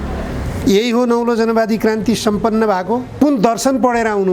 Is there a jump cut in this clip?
yes; 1 cut; at 3.2 s

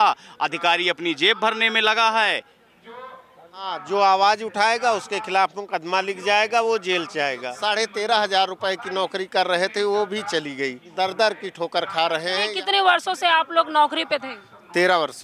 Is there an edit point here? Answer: yes; 4 cuts; at 3.8 s, 7.5 s, 10.8 s, 12.5 s

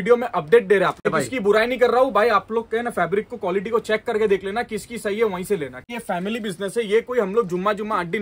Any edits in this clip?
yes; 2 cuts; at 1.0 s, 5.9 s

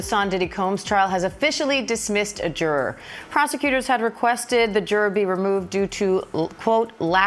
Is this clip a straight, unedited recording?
yes; 0 cuts

